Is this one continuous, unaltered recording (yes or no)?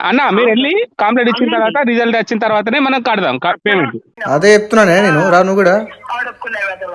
no